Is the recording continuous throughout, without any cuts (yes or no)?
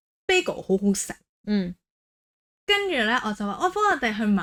yes